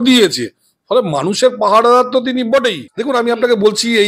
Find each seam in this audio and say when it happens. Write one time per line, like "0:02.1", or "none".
0:02.9